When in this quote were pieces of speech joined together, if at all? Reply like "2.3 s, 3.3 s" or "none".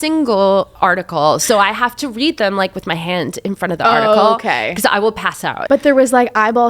5.6 s